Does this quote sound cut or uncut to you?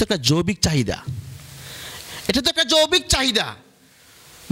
uncut